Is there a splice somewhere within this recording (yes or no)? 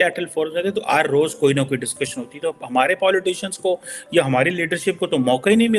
no